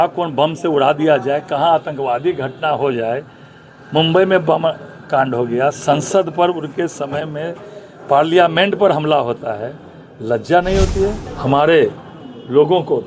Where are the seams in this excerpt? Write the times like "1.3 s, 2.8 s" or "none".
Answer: 11.3 s